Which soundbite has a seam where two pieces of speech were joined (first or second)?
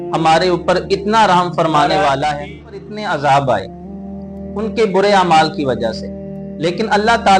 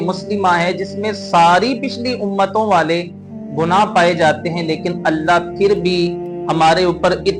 first